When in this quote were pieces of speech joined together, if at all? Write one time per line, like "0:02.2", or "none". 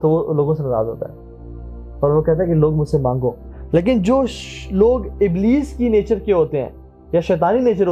0:03.5